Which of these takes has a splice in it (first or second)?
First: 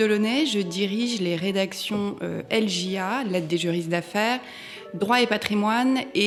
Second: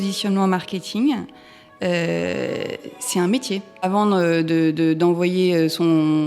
second